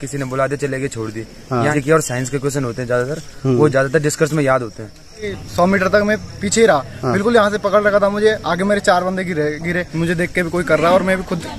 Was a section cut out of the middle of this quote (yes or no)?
yes